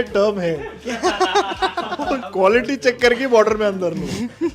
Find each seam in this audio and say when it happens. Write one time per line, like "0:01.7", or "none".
0:02.2